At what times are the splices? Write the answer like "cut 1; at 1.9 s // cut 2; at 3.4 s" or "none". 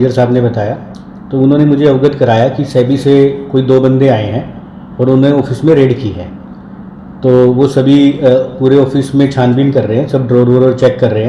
none